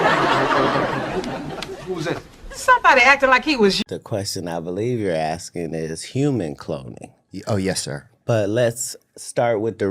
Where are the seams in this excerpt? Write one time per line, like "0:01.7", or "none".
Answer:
0:03.8